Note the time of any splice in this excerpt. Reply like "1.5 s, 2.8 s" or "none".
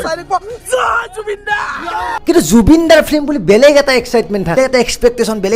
2.1 s, 4.6 s